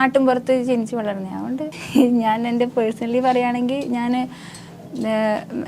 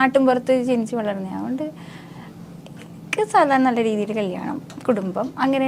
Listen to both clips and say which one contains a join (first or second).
first